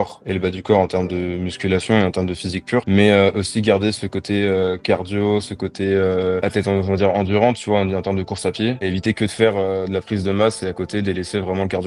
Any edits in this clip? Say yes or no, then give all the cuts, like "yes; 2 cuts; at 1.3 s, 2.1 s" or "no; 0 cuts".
no; 0 cuts